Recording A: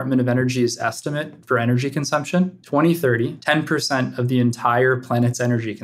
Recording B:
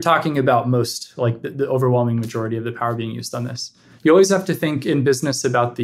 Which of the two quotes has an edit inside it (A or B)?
A